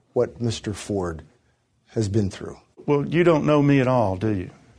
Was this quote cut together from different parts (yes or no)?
yes